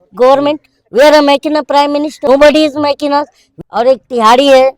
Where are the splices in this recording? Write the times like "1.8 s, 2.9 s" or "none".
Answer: 2.2 s, 3.4 s